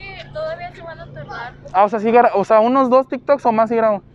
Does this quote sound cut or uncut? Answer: uncut